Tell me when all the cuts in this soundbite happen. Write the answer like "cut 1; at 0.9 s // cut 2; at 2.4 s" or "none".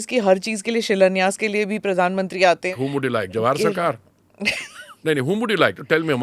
cut 1; at 2.7 s